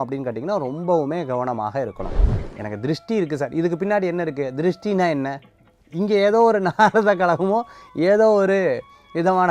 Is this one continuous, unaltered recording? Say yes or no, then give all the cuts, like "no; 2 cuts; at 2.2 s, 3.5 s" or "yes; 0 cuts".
no; 1 cut; at 2.4 s